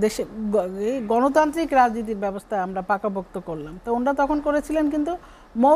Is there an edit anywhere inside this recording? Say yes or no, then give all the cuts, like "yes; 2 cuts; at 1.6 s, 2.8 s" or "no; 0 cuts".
no; 0 cuts